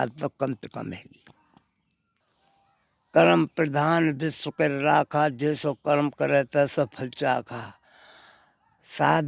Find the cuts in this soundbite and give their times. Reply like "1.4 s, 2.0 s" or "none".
2.0 s